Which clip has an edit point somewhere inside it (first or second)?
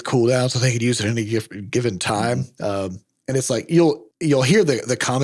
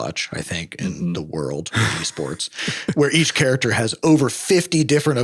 second